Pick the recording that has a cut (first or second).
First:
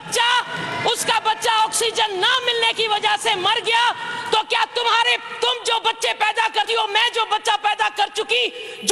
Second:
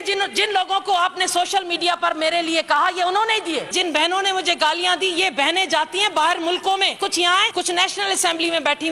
second